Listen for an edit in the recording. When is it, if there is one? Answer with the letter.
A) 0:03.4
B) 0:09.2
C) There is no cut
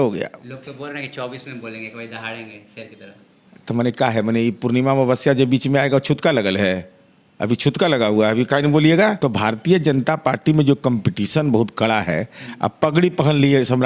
B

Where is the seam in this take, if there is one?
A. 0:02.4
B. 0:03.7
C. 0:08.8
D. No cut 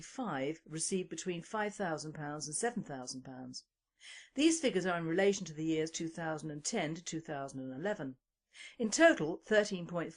C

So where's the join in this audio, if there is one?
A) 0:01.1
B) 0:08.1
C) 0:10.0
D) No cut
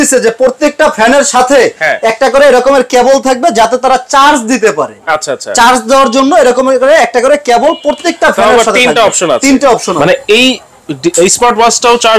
C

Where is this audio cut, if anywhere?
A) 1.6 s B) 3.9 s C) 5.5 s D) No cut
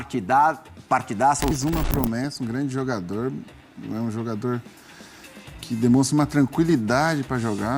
A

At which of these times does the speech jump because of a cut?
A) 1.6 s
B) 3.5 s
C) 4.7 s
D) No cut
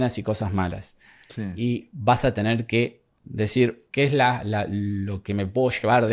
B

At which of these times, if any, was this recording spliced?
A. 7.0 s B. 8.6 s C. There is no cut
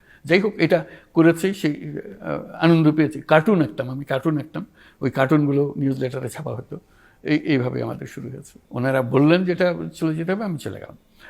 B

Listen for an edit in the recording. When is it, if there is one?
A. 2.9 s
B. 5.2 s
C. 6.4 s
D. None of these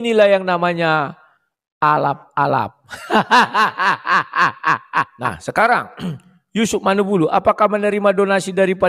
B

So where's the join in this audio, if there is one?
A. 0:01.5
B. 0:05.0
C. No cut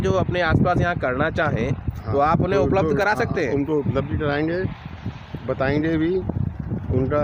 C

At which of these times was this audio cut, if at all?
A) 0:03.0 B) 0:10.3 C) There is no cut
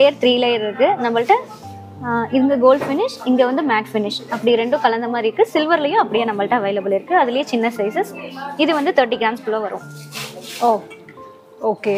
C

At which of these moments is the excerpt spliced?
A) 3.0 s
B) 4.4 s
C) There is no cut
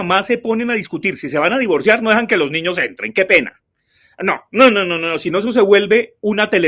C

